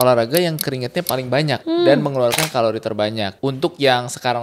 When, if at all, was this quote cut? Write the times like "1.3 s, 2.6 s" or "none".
1.6 s, 3.3 s